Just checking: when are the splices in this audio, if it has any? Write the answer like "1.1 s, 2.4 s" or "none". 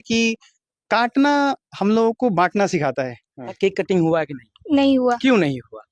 3.5 s